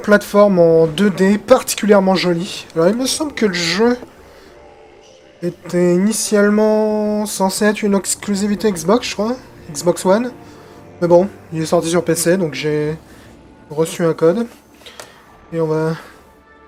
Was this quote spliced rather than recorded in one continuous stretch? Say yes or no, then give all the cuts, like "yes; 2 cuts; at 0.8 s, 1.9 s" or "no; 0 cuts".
no; 0 cuts